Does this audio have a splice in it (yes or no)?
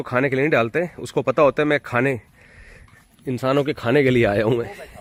no